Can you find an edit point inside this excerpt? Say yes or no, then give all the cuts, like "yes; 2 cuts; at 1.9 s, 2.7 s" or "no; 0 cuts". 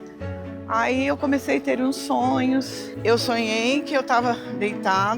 yes; 1 cut; at 2.6 s